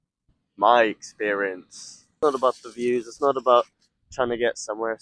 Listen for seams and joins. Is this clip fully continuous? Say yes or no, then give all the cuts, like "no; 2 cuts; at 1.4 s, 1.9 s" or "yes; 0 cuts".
no; 1 cut; at 2.2 s